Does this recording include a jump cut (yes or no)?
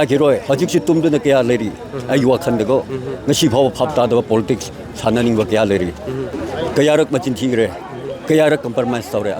yes